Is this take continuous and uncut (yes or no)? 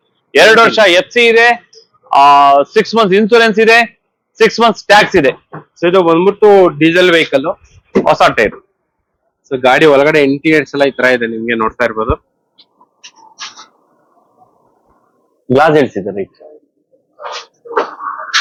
yes